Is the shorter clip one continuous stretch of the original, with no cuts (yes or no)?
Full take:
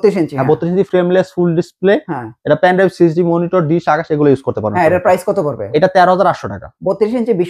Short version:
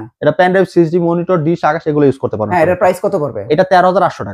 yes